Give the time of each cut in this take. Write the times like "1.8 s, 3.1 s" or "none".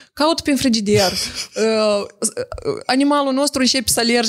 none